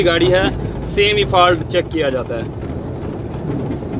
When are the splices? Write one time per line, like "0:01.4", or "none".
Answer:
none